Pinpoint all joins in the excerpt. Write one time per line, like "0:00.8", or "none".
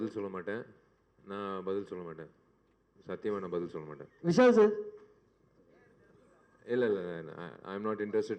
none